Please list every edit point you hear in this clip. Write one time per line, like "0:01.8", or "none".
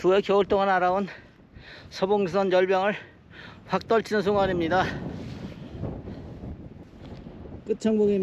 0:06.8